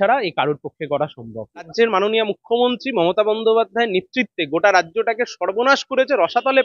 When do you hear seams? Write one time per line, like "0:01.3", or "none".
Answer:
0:01.7